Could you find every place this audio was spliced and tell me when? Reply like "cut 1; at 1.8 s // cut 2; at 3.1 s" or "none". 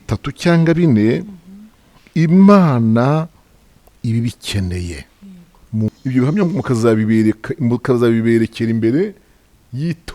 cut 1; at 5.9 s